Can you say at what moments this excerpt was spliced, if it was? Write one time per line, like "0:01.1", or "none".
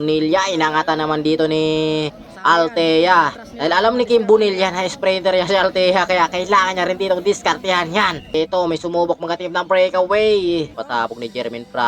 0:02.2
0:08.3
0:10.8